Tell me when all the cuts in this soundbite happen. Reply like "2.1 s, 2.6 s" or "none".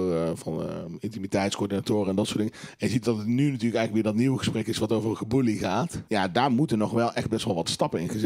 6.0 s